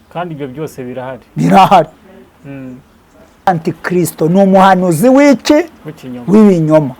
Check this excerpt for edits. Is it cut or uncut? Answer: cut